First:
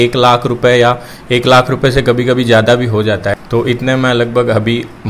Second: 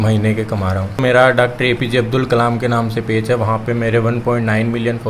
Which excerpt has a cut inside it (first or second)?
second